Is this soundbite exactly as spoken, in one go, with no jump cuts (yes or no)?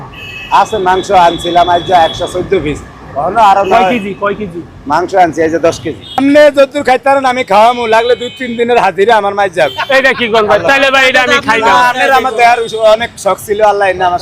no